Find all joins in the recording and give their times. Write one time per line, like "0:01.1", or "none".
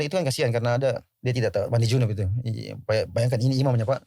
0:01.1